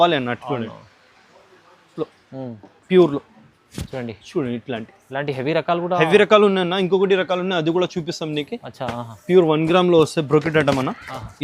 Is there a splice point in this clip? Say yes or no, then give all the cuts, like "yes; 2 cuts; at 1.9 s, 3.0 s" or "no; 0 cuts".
yes; 1 cut; at 1.9 s